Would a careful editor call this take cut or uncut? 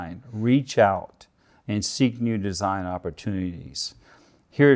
uncut